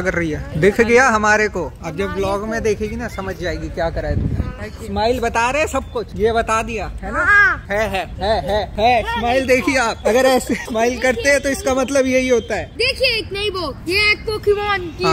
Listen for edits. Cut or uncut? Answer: uncut